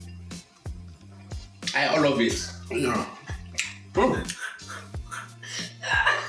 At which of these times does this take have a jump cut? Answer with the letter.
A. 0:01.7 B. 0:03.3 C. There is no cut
A